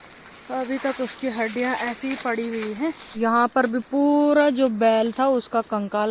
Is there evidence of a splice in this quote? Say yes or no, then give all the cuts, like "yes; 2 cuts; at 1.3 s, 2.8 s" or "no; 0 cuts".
yes; 1 cut; at 3.0 s